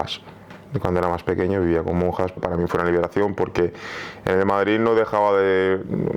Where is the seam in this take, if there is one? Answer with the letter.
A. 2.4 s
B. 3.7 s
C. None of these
A